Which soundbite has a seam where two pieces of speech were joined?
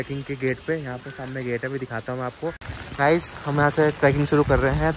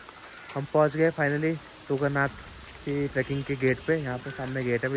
first; 1 cut; at 2.7 s

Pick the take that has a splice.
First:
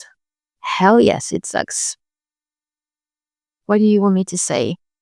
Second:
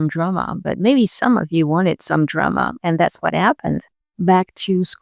second; 1 cut; at 4.0 s

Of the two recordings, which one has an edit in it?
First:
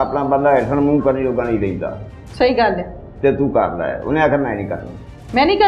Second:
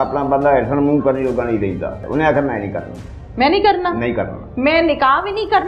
second; 1 cut; at 2.0 s

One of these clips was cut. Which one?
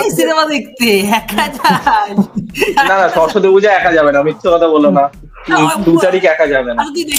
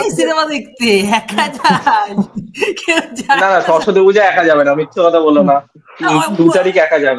first; 1 cut; at 2.7 s

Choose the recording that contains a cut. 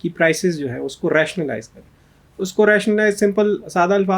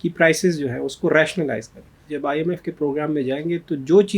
second; 1 cut; at 2.0 s

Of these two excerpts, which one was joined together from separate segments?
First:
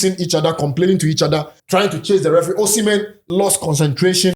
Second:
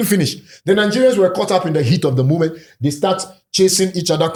first; 2 cuts; at 1.6 s, 3.2 s

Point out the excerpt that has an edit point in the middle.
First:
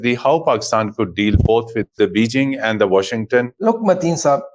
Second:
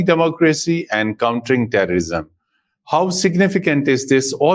first; 2 cuts; at 1.9 s, 3.5 s

